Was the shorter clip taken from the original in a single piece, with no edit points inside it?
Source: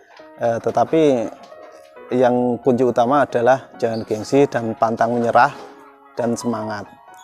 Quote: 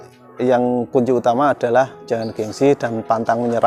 yes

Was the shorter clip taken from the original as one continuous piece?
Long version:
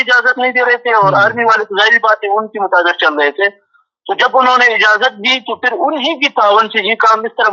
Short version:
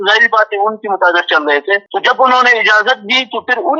no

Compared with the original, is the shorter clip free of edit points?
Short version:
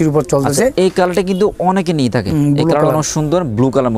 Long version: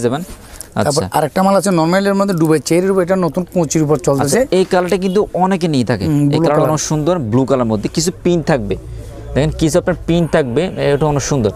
yes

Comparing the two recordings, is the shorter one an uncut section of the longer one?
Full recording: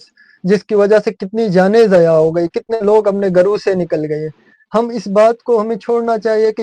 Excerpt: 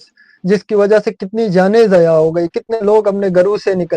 yes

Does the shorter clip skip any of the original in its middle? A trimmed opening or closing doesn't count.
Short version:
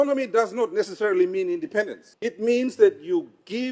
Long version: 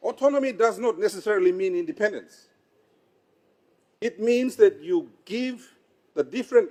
yes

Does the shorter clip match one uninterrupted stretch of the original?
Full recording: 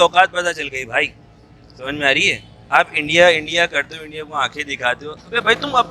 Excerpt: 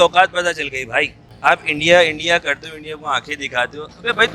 no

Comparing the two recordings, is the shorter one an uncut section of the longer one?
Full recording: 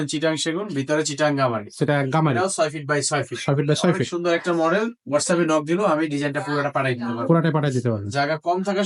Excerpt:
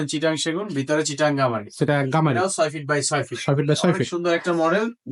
yes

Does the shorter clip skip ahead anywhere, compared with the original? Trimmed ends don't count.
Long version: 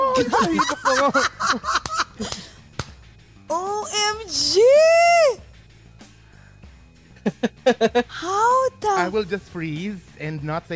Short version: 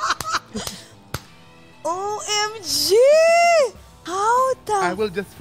yes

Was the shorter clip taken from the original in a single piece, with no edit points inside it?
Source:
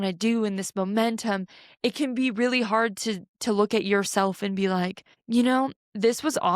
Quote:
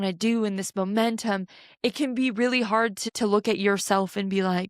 no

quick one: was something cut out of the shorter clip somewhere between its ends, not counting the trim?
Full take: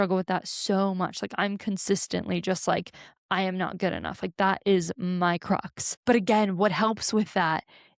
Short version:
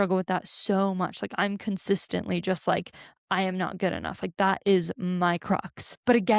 no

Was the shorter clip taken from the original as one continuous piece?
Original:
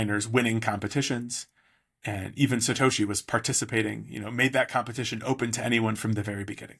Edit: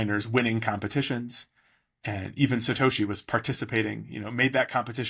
yes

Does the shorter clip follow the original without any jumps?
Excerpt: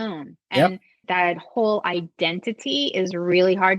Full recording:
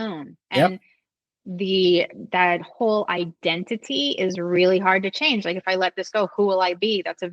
no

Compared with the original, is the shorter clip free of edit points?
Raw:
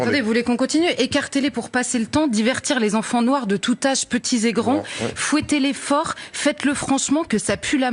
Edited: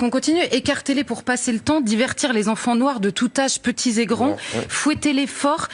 yes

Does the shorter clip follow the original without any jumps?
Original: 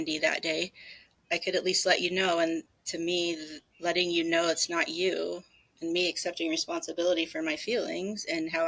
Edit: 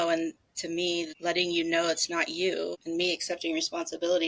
no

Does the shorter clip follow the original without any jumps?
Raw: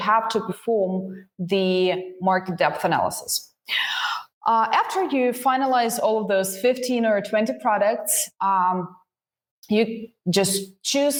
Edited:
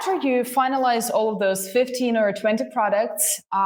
yes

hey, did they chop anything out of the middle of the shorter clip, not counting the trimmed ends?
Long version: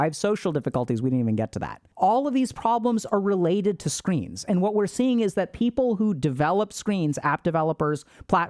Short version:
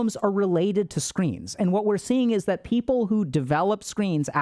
no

